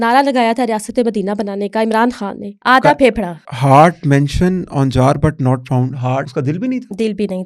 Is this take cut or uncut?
cut